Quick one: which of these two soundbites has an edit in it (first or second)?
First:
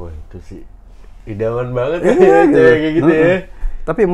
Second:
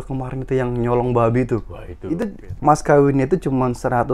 second